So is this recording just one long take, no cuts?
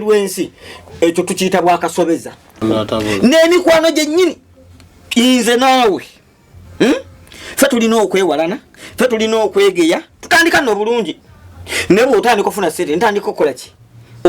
no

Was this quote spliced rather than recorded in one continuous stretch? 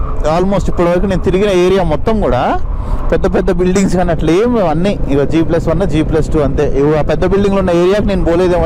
no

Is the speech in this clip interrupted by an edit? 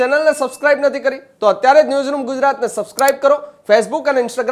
no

